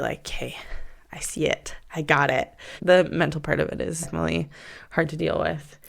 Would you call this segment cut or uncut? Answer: cut